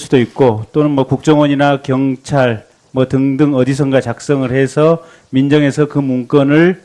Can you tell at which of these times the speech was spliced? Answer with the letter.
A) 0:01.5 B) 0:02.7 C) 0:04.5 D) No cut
A